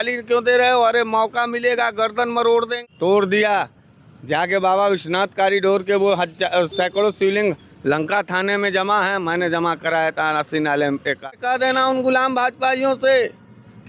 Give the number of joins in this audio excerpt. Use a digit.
2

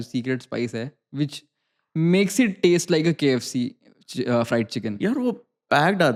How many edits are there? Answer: 0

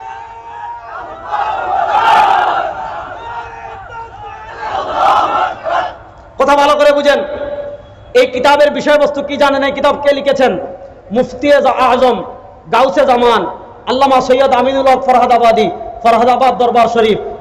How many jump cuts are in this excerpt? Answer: 0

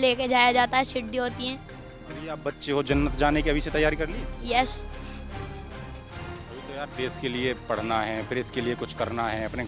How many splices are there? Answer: 0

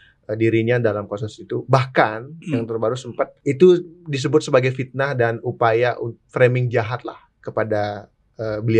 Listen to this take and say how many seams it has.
1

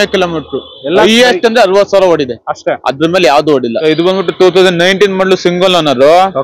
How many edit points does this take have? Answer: 1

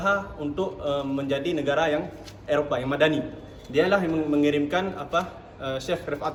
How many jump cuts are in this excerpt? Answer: 0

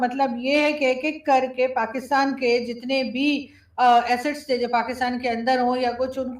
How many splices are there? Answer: 0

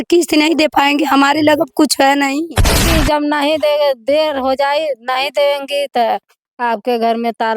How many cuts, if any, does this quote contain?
1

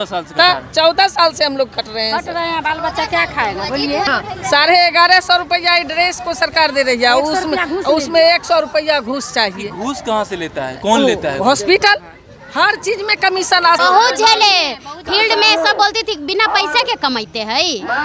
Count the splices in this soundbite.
2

